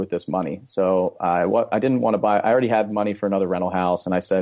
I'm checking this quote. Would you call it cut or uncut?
uncut